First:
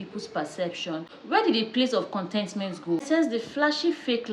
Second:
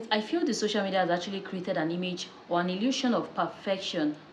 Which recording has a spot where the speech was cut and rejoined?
first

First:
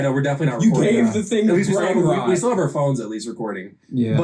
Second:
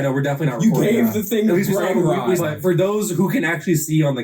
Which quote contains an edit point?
second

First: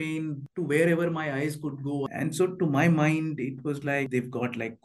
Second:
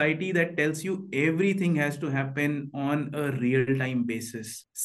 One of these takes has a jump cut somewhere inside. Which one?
first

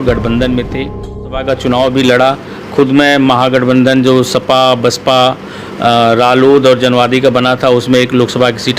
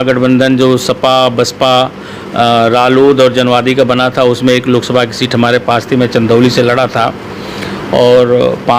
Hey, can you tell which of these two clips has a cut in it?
first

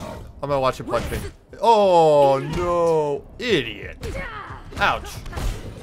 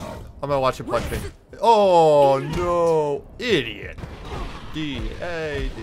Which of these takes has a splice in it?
second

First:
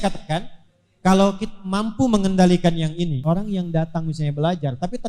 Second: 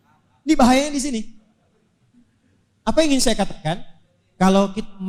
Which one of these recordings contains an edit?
first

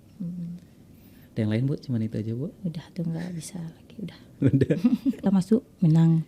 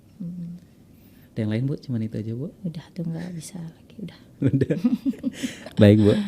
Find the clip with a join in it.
first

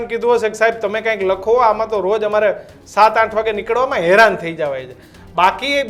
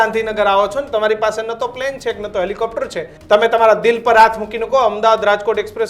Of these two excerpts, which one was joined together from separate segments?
second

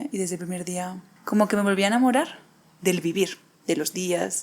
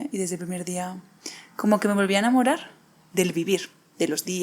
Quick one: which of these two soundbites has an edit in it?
first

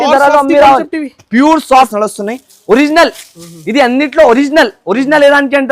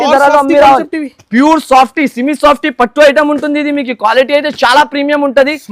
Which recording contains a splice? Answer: first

